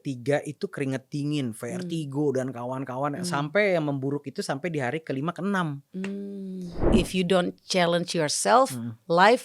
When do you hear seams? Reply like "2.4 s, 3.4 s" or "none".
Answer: 6.9 s